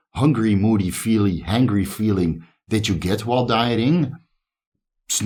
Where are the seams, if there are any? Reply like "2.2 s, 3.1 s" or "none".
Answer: none